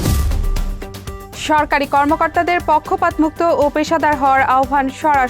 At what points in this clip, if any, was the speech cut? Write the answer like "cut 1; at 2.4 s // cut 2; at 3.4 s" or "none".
cut 1; at 1.3 s